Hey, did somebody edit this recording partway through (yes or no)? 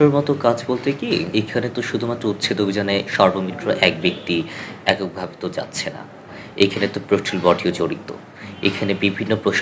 yes